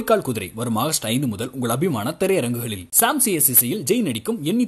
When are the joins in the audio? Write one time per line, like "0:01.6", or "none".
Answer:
none